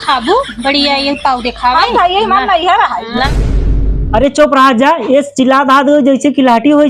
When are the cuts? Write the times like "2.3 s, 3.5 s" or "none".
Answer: 3.3 s